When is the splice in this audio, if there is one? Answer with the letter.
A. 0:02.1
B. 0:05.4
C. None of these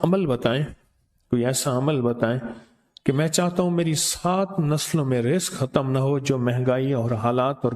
C